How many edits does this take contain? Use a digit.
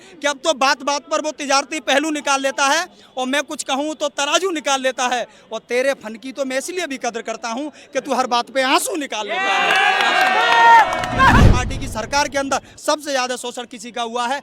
1